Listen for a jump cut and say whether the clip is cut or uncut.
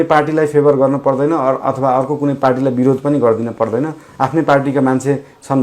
uncut